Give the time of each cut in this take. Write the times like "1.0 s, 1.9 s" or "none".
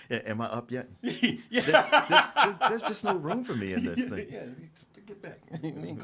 none